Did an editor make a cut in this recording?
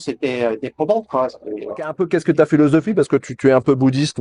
yes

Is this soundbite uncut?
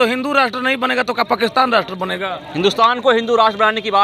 yes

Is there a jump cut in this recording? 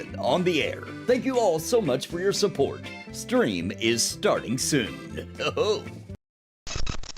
yes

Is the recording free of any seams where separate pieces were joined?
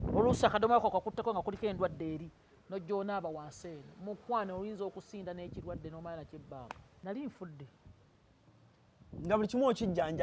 no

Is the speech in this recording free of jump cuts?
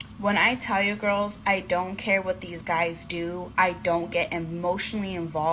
yes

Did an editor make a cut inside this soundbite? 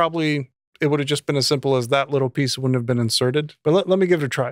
yes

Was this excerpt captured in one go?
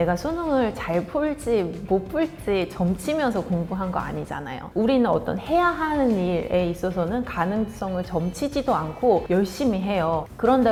yes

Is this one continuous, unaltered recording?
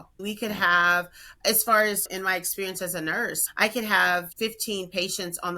yes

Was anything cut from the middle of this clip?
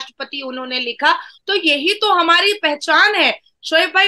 no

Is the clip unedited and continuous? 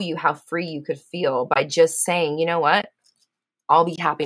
yes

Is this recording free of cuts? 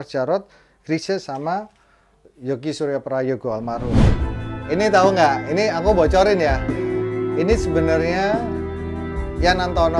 no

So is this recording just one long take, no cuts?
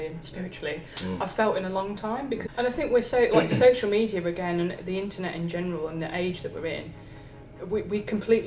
no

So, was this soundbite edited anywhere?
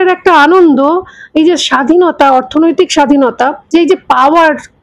no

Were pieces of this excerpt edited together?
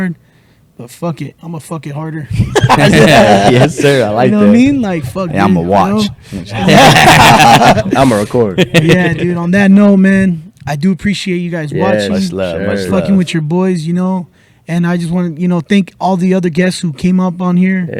no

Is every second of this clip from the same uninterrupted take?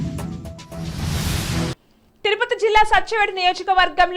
no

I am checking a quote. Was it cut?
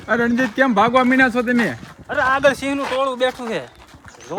no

